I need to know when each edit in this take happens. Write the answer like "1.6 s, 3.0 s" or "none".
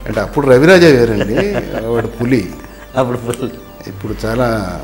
none